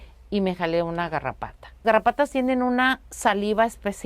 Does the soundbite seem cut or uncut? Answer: cut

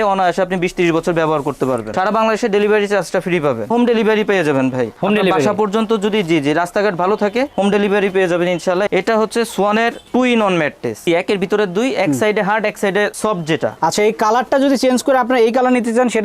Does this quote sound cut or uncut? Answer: cut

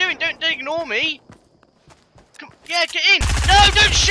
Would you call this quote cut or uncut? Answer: uncut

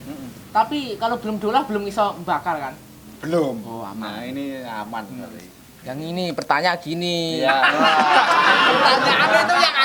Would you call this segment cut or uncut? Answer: uncut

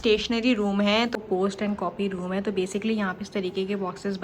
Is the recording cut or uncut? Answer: cut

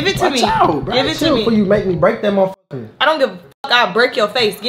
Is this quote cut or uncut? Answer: uncut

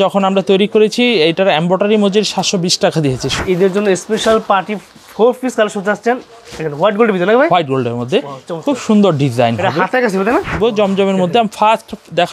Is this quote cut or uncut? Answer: cut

